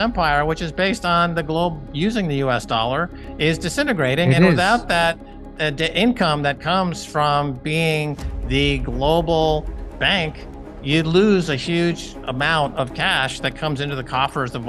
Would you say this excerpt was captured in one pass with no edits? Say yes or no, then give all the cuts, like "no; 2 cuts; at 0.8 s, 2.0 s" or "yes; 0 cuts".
yes; 0 cuts